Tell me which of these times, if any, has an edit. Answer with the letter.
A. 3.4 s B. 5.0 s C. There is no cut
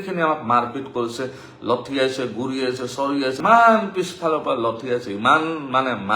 A